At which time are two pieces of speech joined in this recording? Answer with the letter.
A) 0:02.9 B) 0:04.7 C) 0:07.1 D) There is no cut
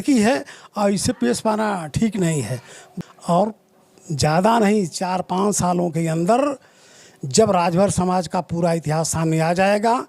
A